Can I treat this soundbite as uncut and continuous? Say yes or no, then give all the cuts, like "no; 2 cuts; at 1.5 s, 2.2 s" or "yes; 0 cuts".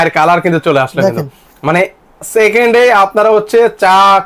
yes; 0 cuts